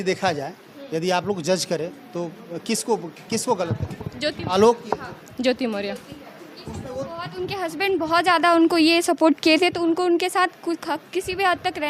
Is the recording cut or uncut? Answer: uncut